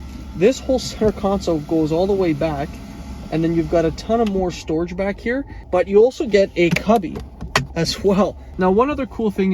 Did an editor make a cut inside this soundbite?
yes; 2 cuts; at 5.5 s, 8.4 s

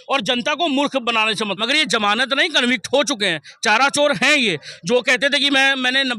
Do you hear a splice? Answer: yes; 1 cut; at 1.5 s

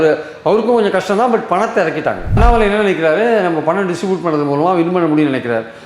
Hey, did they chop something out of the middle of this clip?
yes; 1 cut; at 2.4 s

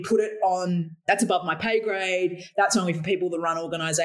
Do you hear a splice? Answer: yes; 1 cut; at 1.0 s

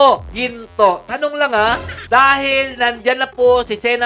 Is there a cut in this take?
yes; 1 cut; at 2.0 s

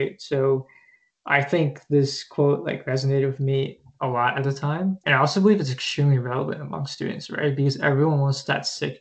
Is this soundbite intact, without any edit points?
no; 1 cut; at 5.0 s

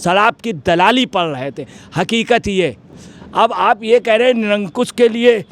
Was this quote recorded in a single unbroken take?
yes; 0 cuts

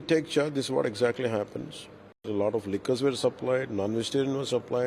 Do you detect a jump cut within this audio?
yes; 1 cut; at 2.3 s

